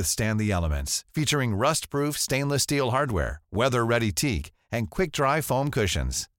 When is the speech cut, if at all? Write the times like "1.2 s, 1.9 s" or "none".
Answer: none